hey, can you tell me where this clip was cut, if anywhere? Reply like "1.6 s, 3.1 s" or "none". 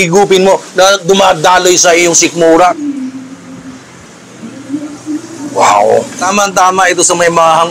2.8 s, 6.2 s